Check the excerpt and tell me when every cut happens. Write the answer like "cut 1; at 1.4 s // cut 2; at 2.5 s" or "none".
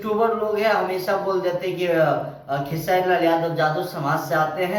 none